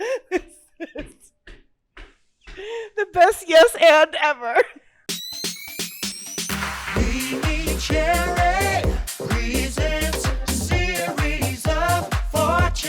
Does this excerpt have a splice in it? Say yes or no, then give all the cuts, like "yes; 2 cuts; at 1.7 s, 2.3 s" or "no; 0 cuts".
yes; 1 cut; at 5.2 s